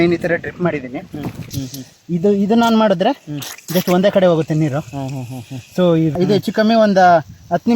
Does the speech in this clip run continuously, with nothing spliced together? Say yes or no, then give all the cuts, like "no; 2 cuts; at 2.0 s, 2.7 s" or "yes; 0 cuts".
no; 2 cuts; at 1.5 s, 6.1 s